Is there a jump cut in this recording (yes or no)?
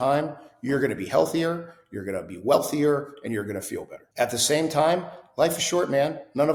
no